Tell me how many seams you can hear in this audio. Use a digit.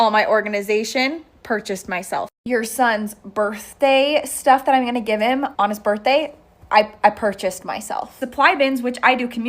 2